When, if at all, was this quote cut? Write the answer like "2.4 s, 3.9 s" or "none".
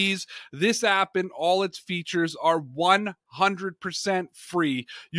none